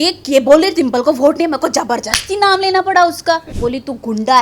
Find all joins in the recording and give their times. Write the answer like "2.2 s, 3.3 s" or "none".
3.5 s